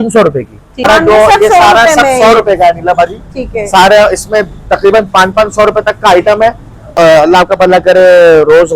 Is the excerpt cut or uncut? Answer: cut